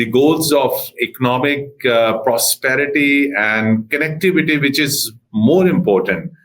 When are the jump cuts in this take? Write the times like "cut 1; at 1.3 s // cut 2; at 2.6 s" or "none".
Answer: none